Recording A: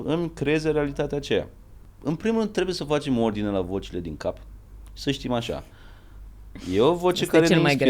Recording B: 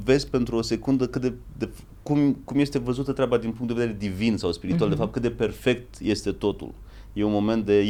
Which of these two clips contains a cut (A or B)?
A